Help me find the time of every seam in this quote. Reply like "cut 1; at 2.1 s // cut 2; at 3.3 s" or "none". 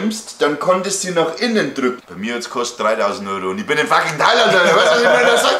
cut 1; at 2.0 s